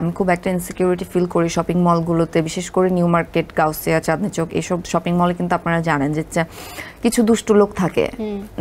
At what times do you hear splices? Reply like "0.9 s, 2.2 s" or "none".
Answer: none